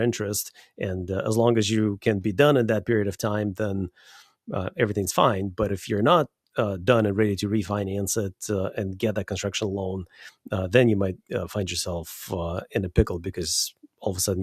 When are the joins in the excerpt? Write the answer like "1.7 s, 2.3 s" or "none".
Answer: none